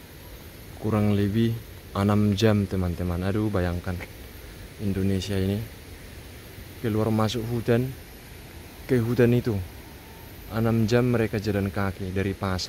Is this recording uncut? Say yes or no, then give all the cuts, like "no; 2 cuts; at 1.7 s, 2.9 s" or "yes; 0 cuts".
yes; 0 cuts